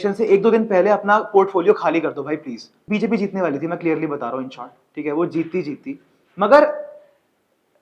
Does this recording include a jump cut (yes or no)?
yes